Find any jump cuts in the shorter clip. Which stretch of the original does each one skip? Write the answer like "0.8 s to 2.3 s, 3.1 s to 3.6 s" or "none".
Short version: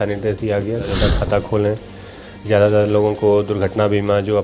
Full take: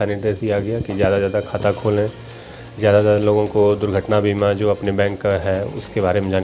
0.9 s to 1.2 s